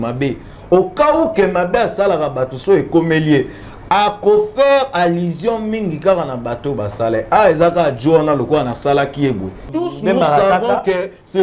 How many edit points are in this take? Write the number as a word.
one